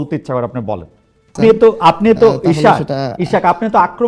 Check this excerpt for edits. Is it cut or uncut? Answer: cut